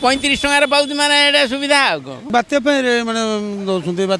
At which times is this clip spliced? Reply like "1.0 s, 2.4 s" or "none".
2.1 s

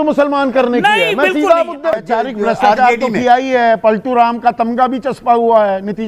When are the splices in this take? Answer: 2.0 s

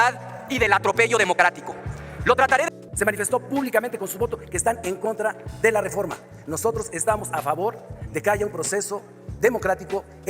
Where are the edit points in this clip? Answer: 2.7 s

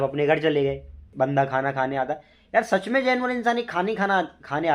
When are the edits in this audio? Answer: 1.0 s

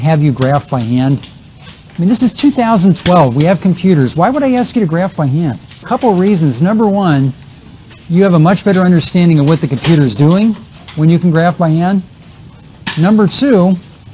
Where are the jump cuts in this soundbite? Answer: 5.8 s

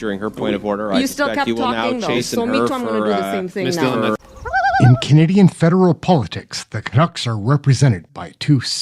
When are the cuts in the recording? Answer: 4.2 s

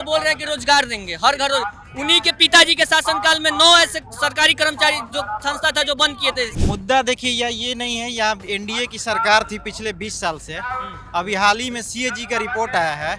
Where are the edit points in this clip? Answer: 6.6 s

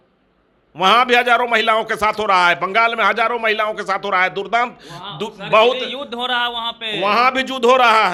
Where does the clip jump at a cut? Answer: none

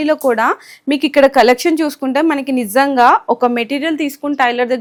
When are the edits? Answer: none

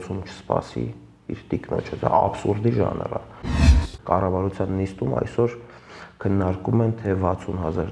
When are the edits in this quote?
3.7 s

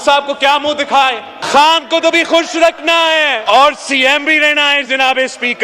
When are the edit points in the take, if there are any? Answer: 1.4 s, 3.4 s

